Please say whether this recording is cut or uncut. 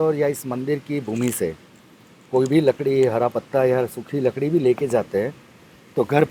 uncut